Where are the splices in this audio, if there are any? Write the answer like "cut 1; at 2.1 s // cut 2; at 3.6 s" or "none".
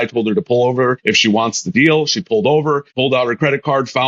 cut 1; at 1.0 s // cut 2; at 2.9 s